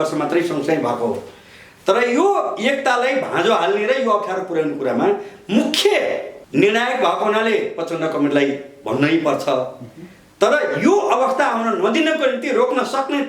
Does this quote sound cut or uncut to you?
cut